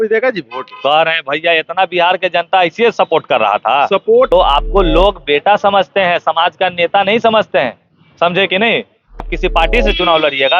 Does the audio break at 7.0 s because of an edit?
no; 2 cuts; at 4.3 s, 9.2 s

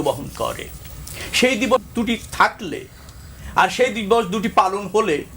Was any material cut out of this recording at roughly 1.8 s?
yes; 1 cut; at 1.8 s

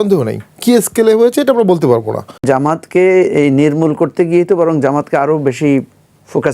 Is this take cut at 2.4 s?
yes; 1 cut; at 2.4 s

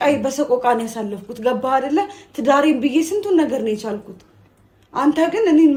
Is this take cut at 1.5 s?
no; 0 cuts

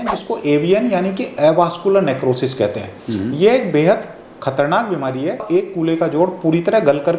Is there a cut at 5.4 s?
yes; 1 cut; at 5.4 s

